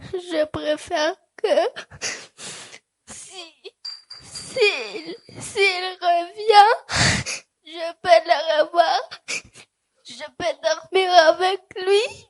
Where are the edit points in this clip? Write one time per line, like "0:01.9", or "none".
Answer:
none